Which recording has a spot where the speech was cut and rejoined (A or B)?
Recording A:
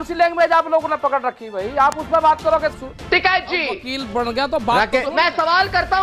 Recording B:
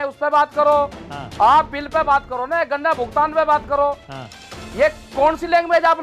A